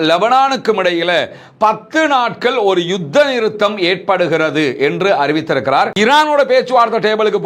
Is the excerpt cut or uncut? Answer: cut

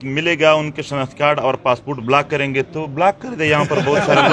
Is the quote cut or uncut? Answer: uncut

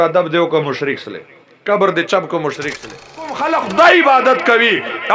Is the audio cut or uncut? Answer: cut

